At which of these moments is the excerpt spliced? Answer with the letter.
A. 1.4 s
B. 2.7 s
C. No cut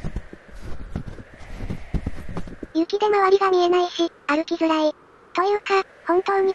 B